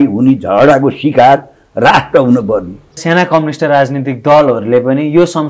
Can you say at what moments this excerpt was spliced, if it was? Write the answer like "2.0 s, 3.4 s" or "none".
2.9 s